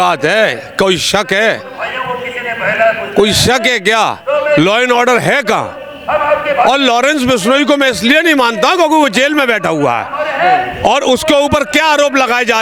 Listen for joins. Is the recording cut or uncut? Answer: uncut